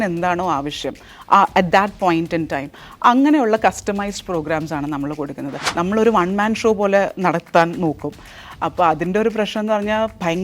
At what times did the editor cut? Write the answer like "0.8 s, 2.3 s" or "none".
5.7 s